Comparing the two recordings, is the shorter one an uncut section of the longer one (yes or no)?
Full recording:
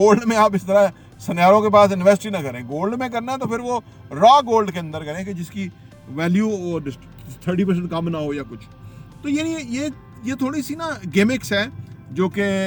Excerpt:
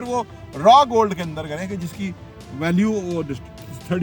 yes